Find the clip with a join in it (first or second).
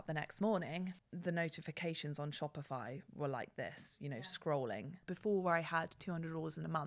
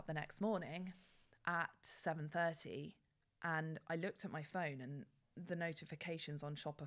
first